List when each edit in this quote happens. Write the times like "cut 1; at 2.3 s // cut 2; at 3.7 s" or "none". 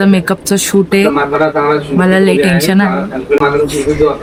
none